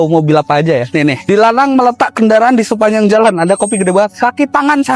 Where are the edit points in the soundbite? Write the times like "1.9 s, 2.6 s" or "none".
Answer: none